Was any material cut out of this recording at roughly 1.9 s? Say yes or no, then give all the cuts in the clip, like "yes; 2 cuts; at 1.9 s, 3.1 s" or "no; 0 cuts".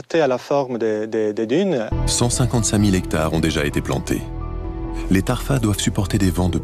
yes; 1 cut; at 1.9 s